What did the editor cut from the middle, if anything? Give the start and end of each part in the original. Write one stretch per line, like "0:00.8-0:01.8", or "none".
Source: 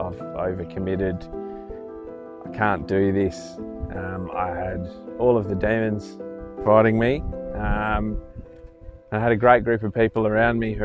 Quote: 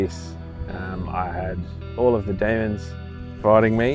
none